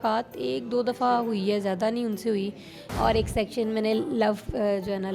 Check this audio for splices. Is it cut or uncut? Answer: cut